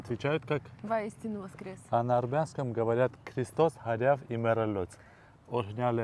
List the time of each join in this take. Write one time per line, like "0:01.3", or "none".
none